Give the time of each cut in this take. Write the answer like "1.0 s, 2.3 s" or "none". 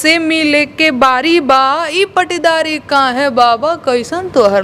none